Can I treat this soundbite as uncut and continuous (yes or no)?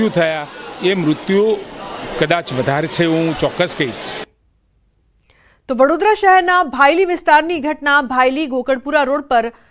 yes